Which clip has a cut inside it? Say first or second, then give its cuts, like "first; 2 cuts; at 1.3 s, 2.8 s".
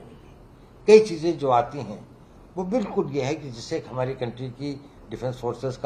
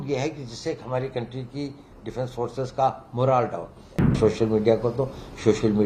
second; 1 cut; at 4.2 s